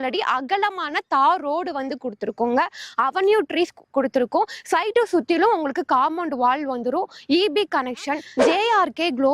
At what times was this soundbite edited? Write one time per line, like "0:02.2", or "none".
0:08.3